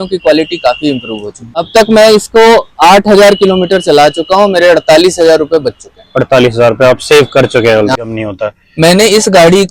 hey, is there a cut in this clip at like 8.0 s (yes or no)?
yes